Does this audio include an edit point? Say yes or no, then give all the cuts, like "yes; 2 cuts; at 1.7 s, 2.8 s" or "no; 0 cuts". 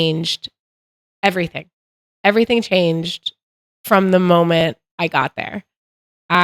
no; 0 cuts